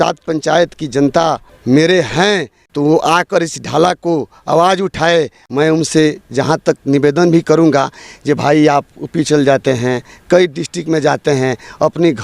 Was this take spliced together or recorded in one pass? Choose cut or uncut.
cut